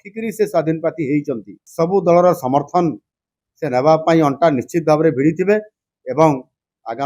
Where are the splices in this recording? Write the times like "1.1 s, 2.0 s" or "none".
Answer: 1.6 s

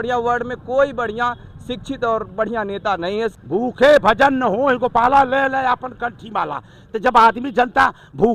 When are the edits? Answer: 3.3 s

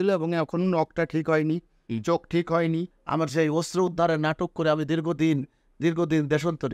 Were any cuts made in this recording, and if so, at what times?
3.0 s

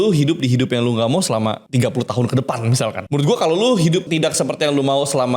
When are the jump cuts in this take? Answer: 1.6 s, 3.0 s, 4.1 s

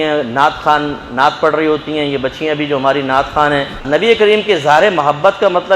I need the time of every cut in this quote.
3.8 s

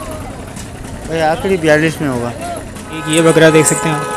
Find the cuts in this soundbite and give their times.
3.0 s

